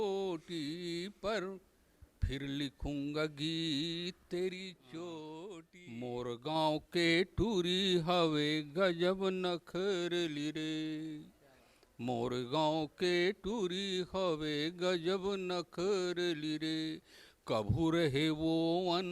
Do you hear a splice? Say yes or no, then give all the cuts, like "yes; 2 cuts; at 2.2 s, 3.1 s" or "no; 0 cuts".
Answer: yes; 1 cut; at 5.7 s